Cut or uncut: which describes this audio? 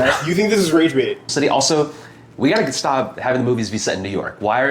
cut